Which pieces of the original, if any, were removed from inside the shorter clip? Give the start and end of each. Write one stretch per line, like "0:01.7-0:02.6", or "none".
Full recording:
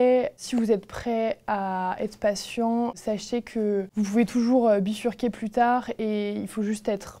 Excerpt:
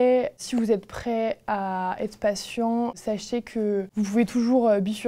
none